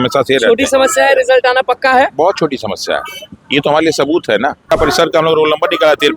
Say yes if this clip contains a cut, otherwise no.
yes